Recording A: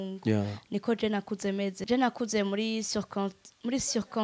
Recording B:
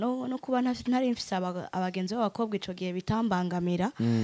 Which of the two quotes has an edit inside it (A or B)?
A